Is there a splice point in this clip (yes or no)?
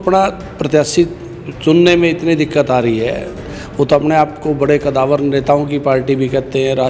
no